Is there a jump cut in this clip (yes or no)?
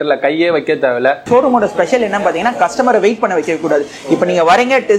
yes